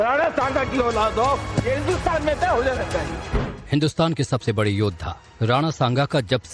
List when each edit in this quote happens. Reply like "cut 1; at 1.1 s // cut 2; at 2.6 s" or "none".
cut 1; at 1.5 s